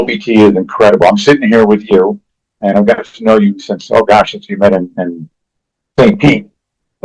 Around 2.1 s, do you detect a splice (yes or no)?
no